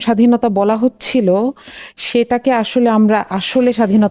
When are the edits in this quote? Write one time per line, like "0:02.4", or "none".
none